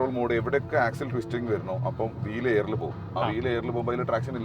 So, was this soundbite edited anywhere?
no; 0 cuts

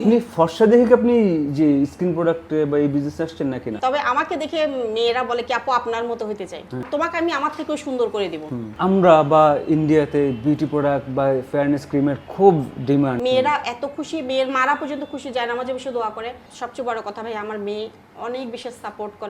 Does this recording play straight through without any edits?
no; 5 cuts; at 3.8 s, 6.9 s, 8.7 s, 13.2 s, 16.4 s

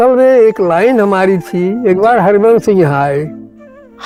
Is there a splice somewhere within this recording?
no; 0 cuts

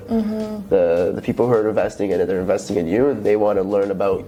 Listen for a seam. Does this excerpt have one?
no; 0 cuts

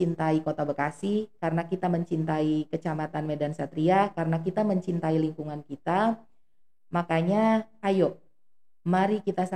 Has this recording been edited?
no; 0 cuts

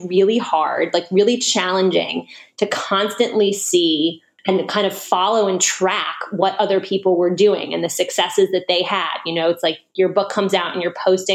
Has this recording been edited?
yes; 1 cut; at 4.3 s

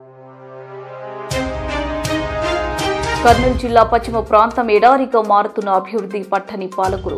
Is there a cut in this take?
no; 0 cuts

